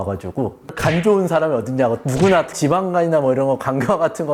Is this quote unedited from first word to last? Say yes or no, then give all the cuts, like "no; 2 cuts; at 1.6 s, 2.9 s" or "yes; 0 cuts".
yes; 0 cuts